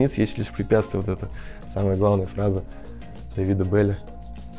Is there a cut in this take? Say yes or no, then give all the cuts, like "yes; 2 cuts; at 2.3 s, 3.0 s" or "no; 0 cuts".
no; 0 cuts